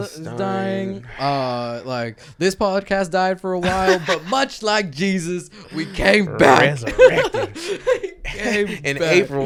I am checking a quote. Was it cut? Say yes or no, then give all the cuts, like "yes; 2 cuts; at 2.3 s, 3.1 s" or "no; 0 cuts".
no; 0 cuts